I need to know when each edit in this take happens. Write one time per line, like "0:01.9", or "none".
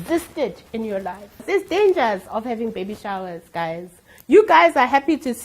0:01.4